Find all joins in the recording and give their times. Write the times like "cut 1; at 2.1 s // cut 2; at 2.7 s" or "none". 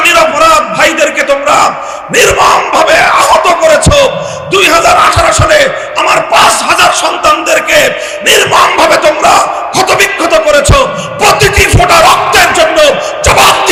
none